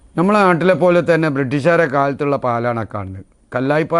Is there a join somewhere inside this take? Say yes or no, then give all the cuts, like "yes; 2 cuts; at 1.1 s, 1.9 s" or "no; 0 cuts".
no; 0 cuts